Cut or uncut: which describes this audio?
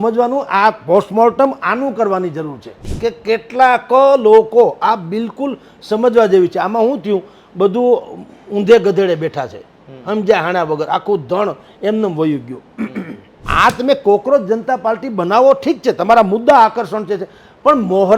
cut